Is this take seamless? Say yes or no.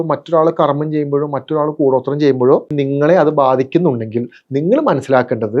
no